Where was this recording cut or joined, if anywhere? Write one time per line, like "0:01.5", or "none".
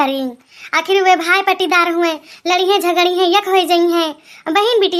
none